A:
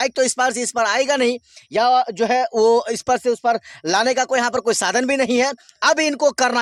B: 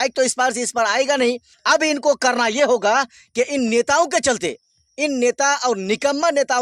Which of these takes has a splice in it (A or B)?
B